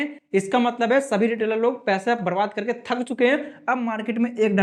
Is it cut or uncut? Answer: uncut